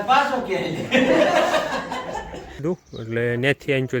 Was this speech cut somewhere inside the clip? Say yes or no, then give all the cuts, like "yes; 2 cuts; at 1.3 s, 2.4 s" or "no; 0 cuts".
yes; 1 cut; at 2.6 s